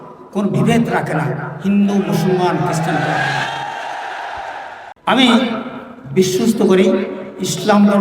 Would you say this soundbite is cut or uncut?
cut